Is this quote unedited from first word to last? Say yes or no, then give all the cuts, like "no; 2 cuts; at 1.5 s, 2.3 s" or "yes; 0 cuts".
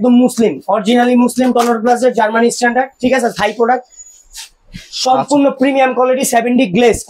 yes; 0 cuts